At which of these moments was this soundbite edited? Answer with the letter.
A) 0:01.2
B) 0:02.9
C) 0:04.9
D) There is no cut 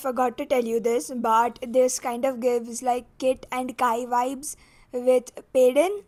D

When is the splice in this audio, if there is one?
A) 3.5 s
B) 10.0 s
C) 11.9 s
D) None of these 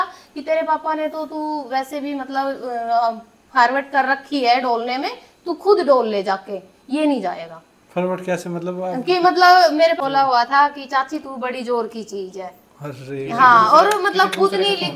B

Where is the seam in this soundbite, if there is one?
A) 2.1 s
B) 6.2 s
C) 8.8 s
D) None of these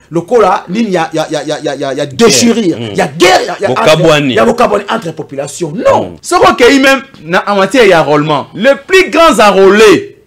B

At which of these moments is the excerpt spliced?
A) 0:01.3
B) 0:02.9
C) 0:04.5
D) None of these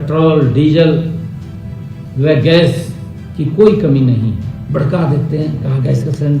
C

